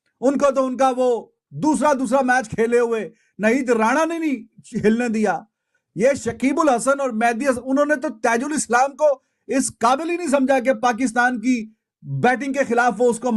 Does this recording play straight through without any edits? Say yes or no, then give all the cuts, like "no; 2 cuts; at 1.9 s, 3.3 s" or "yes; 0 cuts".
yes; 0 cuts